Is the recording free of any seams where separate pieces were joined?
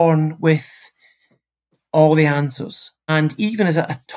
no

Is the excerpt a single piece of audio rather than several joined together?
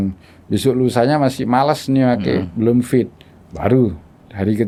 yes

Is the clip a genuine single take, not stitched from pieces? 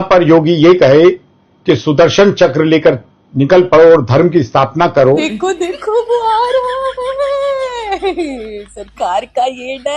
no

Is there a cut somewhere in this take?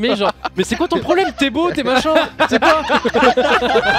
no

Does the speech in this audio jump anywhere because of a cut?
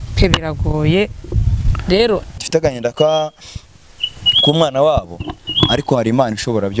yes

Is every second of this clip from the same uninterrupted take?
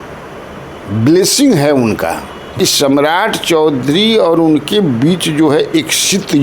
no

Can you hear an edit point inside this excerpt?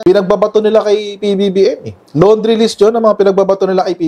no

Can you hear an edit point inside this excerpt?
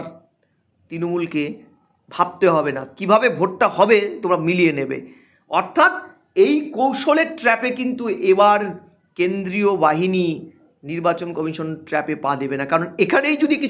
no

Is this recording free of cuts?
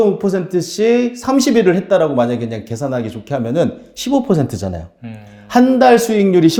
yes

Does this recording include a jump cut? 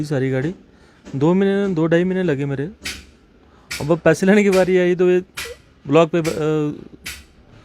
no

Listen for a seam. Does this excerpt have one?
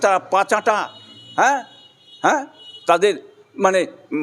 no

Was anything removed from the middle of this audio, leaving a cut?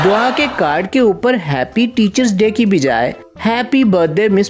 no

